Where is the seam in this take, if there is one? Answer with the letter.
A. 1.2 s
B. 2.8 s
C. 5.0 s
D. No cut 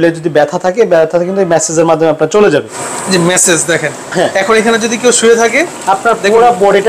B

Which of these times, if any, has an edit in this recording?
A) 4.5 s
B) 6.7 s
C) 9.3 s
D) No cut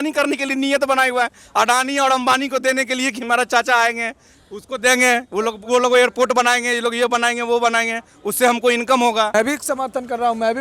C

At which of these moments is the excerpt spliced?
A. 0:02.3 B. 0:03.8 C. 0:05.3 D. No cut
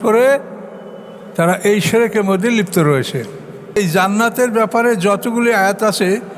B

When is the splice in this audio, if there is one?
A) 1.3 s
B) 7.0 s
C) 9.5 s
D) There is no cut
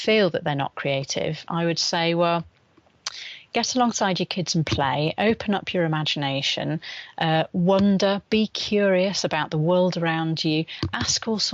D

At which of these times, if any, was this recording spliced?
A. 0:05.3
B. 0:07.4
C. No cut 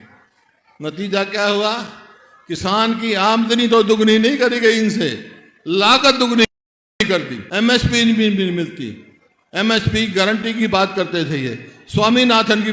B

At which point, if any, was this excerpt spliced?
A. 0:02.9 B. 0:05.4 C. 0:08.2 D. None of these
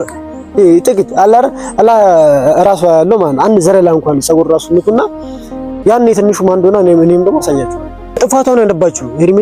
C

